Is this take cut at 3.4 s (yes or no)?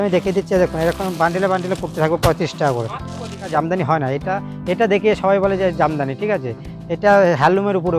yes